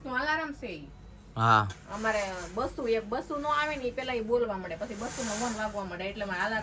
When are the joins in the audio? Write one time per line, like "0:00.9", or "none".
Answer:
none

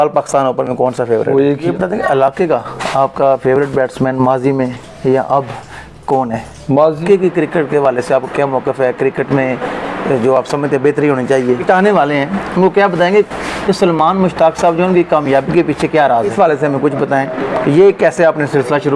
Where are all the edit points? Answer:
0:01.6
0:07.0
0:11.6
0:16.3

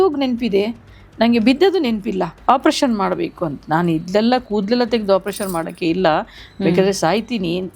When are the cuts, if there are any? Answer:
0:02.3

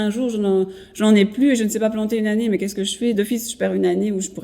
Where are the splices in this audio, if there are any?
0:03.1

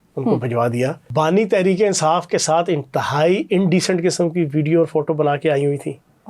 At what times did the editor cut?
0:01.0

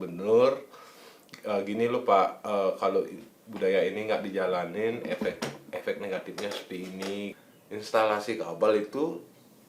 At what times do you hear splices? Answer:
0:07.3

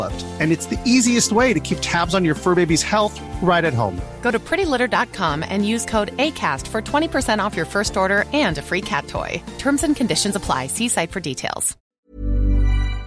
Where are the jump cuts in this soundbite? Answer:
0:11.8

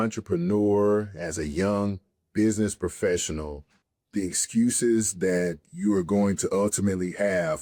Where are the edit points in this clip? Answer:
none

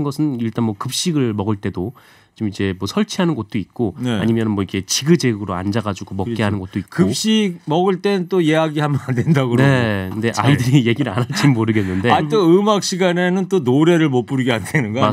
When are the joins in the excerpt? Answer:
none

